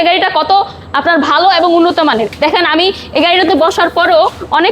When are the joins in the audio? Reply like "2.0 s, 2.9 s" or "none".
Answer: 2.3 s